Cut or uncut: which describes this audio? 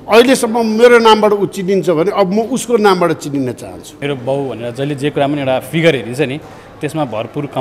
cut